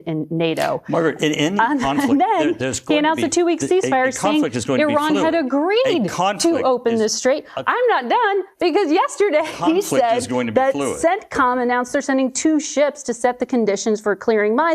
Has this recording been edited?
no; 0 cuts

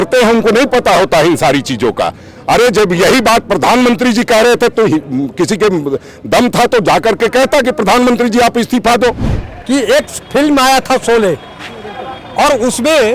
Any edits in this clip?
yes; 1 cut; at 9.3 s

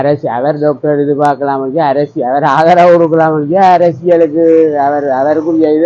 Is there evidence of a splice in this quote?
no; 0 cuts

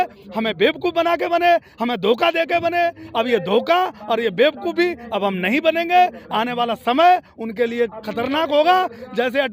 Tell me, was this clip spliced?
no; 0 cuts

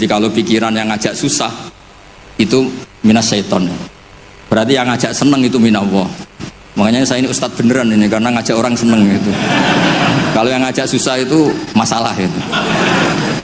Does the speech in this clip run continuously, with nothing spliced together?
yes; 0 cuts

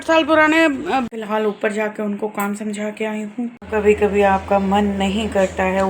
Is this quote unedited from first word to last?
no; 2 cuts; at 1.1 s, 3.6 s

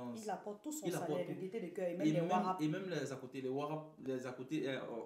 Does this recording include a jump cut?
no; 0 cuts

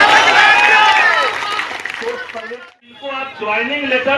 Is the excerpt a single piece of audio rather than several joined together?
no; 1 cut; at 2.9 s

